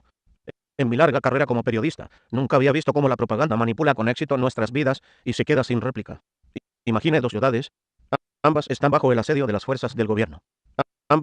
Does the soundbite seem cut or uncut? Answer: cut